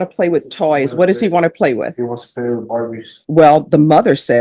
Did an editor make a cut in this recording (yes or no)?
yes